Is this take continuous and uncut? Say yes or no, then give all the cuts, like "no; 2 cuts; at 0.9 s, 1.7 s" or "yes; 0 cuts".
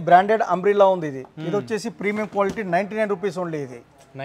yes; 0 cuts